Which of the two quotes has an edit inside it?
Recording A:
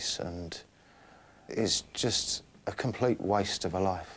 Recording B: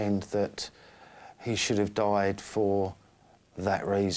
A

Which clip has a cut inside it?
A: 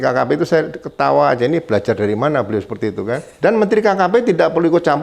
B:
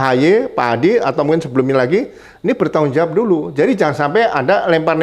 A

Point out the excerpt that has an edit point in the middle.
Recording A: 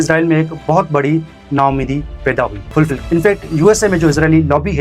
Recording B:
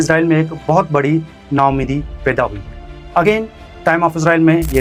A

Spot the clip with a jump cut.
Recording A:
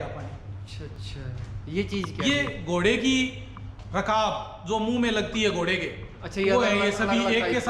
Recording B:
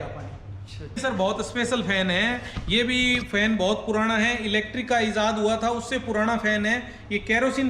B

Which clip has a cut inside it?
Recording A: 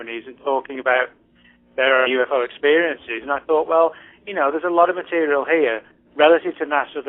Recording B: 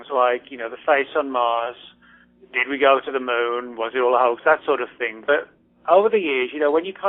A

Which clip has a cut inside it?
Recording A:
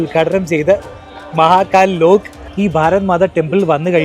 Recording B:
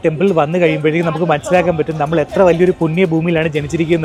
A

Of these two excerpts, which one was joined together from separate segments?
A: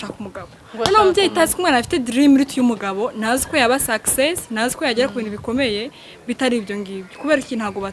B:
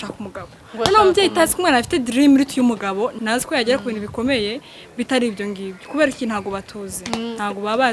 B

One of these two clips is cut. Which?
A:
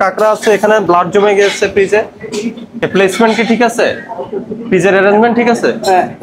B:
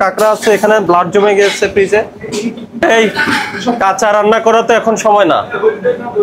B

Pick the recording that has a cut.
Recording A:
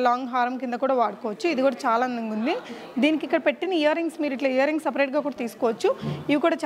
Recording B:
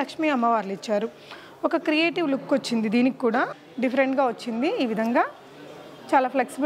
B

